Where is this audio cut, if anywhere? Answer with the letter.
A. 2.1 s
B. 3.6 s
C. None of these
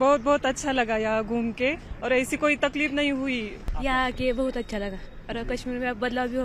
B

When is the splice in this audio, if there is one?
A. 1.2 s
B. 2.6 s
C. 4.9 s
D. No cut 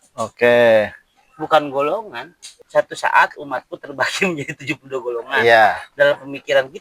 B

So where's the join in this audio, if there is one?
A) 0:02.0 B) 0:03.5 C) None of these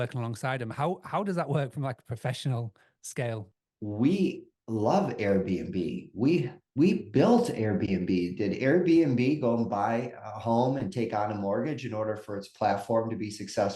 B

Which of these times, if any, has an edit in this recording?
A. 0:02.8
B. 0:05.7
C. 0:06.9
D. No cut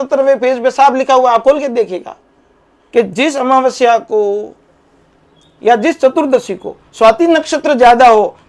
A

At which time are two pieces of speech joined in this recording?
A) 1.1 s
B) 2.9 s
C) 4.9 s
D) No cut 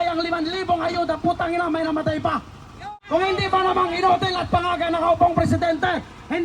B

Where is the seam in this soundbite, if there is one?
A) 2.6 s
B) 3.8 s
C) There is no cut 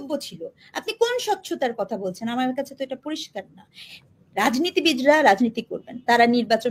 B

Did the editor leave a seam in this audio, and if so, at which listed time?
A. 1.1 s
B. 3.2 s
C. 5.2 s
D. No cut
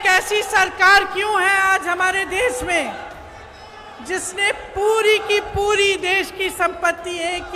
D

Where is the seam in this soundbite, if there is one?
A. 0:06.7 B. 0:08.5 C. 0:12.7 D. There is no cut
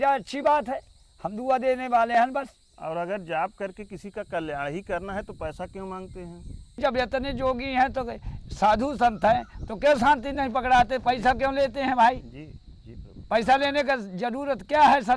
A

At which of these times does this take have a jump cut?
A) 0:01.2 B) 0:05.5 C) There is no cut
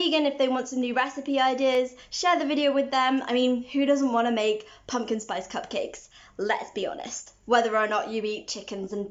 C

